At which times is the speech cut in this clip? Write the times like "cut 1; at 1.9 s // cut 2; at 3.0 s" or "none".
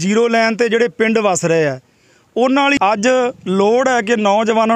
cut 1; at 2.8 s